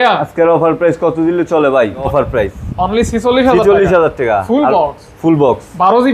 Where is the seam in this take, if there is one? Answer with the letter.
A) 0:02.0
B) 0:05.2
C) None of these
A